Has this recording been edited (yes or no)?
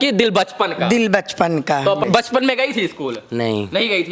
yes